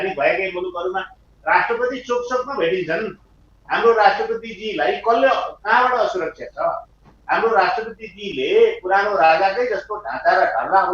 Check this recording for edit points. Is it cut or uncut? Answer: uncut